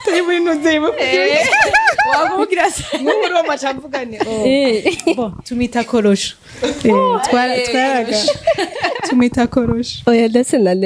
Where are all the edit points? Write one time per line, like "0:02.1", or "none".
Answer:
none